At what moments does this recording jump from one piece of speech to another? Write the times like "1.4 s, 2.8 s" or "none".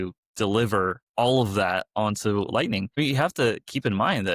1.0 s, 2.9 s